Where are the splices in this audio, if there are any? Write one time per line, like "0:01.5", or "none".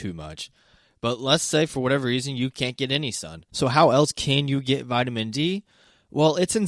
0:03.4